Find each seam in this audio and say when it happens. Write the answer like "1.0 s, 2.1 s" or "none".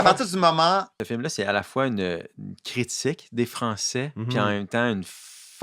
1.0 s

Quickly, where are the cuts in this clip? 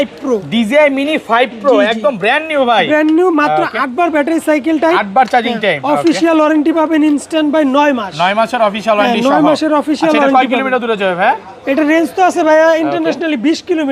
none

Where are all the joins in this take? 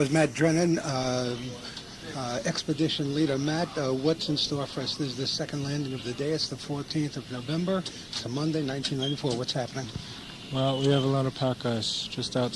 11.2 s

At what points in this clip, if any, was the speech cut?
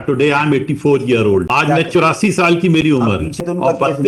1.5 s, 3.4 s

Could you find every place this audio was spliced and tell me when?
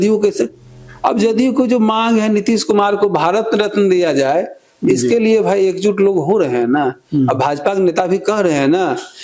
none

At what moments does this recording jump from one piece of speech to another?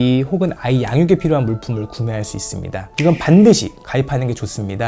2.9 s

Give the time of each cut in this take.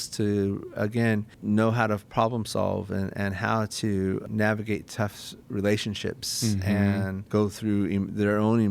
1.3 s, 4.2 s, 7.2 s

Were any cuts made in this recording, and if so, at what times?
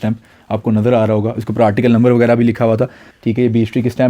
3.0 s

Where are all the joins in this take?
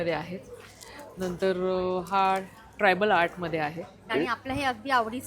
4.1 s

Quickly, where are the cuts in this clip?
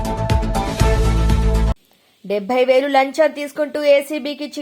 1.7 s

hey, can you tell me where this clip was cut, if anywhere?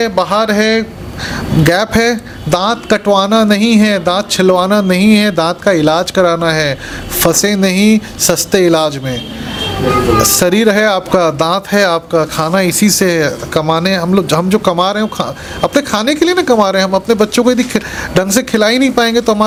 none

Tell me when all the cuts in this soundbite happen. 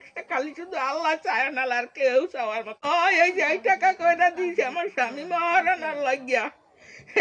2.9 s

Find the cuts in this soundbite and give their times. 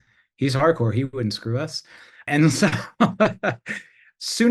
2.2 s

